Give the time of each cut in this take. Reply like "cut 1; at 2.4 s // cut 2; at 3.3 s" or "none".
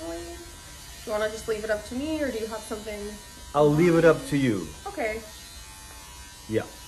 none